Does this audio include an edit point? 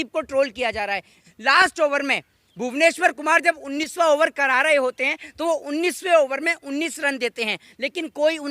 yes; 1 cut; at 1.1 s

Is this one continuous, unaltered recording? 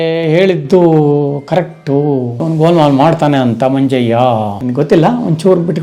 no; 2 cuts; at 2.3 s, 4.6 s

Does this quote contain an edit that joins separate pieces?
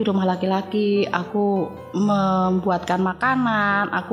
yes; 1 cut; at 1.8 s

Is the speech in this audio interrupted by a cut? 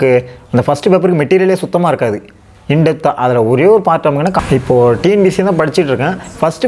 yes; 1 cut; at 4.4 s

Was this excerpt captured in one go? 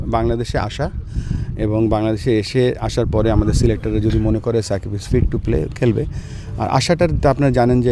yes; 0 cuts

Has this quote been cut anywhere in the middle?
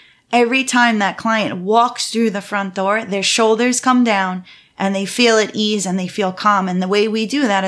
no; 0 cuts

